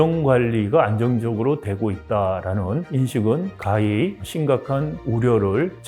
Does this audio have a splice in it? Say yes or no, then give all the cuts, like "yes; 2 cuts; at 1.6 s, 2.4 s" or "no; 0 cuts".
no; 0 cuts